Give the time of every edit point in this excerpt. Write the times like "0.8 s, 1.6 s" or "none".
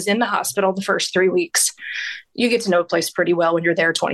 none